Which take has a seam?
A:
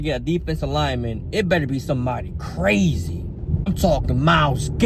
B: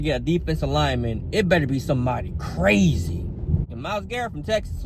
B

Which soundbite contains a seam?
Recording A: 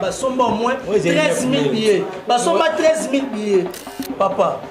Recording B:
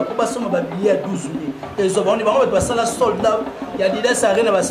A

